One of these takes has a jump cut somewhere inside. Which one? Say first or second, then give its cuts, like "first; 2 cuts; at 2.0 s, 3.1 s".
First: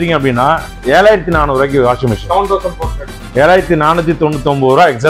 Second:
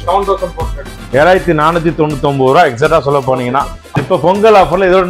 second; 1 cut; at 3.9 s